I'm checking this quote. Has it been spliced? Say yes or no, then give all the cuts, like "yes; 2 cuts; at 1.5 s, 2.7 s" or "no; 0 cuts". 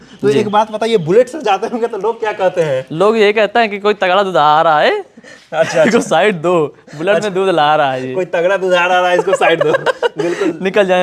no; 0 cuts